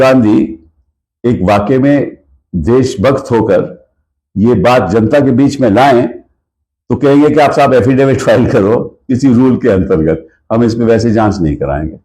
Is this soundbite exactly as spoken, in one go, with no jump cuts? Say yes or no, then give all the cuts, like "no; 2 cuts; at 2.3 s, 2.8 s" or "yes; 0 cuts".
yes; 0 cuts